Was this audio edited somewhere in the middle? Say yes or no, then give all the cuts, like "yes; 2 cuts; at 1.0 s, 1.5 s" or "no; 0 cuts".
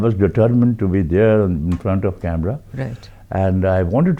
no; 0 cuts